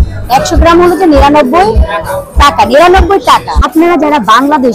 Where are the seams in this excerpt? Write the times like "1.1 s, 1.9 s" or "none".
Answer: 3.6 s